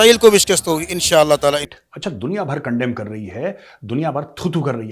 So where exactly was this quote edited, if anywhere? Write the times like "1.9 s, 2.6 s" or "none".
1.7 s

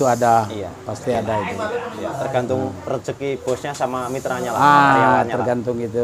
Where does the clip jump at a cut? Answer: none

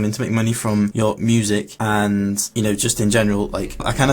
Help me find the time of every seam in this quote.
0.9 s, 1.7 s, 2.5 s

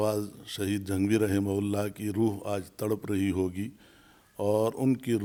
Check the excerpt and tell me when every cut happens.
none

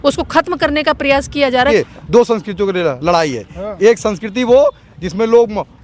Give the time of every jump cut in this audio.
1.7 s

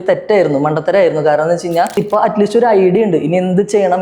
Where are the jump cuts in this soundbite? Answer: 2.0 s

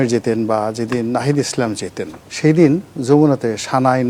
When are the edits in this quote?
none

